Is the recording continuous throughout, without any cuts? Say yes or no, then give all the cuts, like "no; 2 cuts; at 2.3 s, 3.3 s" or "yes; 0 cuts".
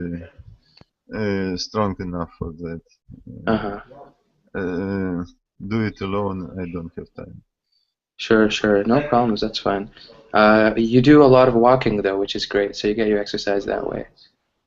no; 1 cut; at 10.6 s